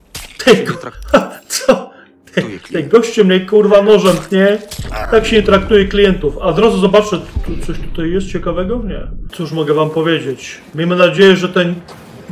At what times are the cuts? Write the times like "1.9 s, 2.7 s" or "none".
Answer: none